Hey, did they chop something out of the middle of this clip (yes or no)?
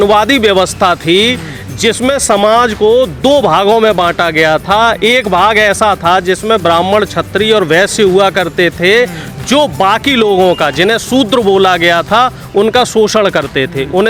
no